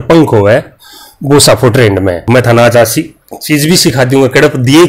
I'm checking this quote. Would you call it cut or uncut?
cut